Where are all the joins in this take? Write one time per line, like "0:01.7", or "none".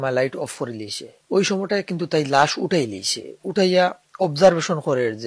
none